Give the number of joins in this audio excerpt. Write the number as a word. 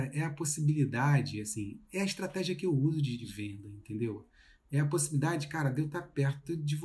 one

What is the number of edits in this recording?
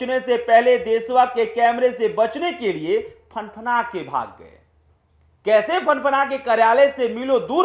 zero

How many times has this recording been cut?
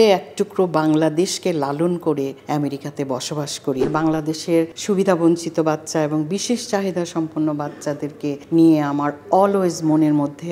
four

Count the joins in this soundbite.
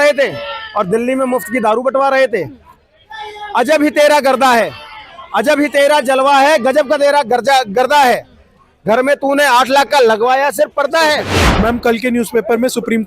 one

